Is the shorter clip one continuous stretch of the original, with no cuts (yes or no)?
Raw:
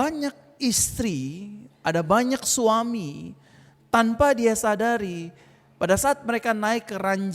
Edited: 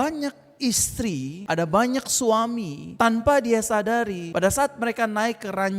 no